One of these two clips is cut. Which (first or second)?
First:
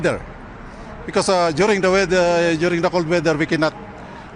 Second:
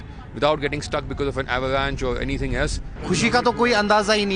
second